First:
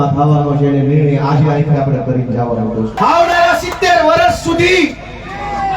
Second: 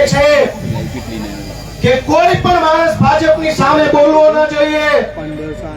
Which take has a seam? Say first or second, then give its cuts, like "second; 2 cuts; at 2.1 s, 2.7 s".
first; 1 cut; at 2.9 s